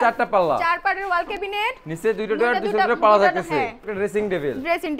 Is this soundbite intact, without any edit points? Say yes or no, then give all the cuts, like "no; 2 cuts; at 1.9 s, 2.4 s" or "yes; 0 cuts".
no; 1 cut; at 3.8 s